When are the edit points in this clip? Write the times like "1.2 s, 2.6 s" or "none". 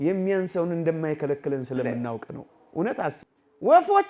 3.2 s